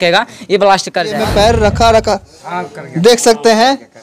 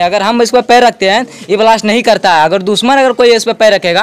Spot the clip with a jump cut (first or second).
first